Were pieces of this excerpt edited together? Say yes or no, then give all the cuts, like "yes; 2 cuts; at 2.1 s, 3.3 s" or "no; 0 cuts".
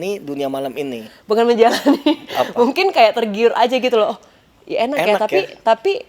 no; 0 cuts